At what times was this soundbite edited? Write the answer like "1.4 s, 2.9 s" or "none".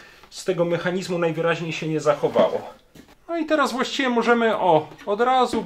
3.1 s